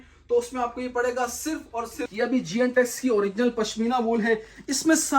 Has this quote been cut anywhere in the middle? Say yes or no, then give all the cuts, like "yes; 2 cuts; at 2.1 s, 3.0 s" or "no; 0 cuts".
yes; 1 cut; at 2.1 s